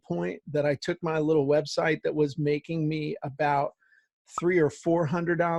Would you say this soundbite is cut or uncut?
uncut